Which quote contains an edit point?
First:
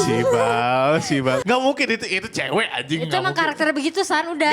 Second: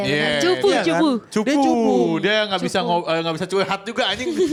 first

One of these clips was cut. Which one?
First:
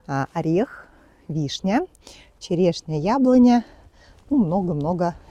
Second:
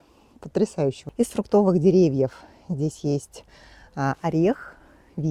second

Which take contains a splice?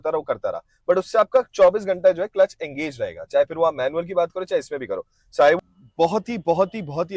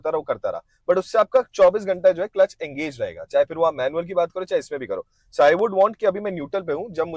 first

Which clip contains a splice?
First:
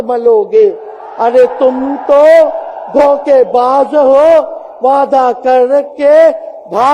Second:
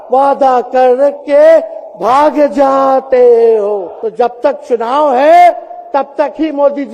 second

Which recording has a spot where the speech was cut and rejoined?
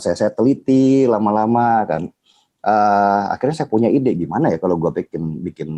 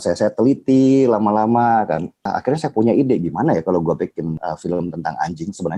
second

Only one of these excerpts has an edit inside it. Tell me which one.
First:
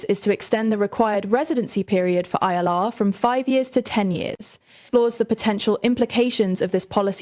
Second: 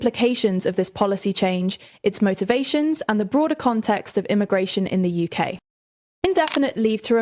first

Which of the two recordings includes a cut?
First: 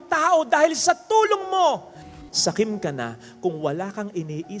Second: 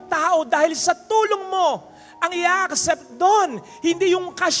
first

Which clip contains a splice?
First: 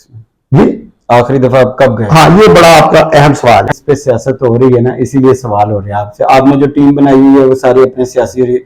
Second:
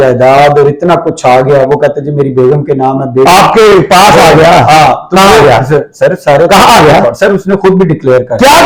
first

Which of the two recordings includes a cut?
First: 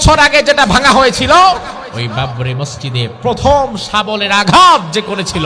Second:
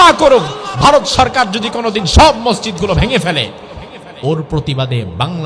first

